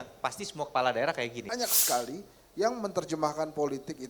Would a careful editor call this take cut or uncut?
cut